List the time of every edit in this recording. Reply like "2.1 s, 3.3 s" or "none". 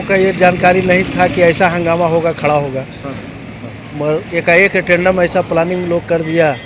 none

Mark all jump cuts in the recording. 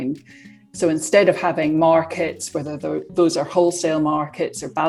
none

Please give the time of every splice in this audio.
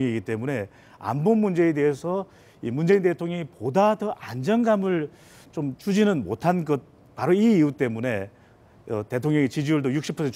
5.1 s

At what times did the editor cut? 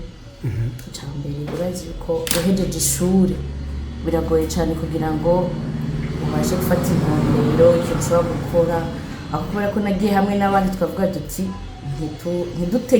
none

